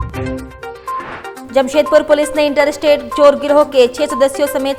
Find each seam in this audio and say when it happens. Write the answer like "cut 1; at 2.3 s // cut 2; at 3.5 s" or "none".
none